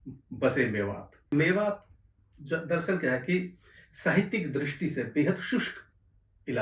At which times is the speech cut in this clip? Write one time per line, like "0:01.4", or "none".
0:01.1